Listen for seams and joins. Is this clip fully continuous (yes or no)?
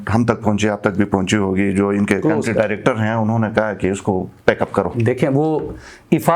yes